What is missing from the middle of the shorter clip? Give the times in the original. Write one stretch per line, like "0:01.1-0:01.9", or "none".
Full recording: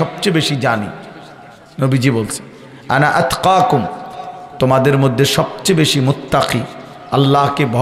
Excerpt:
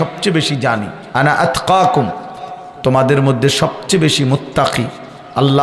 0:01.0-0:02.7